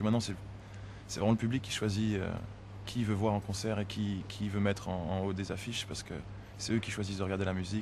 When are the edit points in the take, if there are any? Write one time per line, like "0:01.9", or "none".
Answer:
none